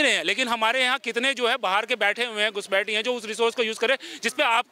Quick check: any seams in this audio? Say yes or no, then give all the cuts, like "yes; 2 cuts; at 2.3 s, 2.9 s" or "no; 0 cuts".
no; 0 cuts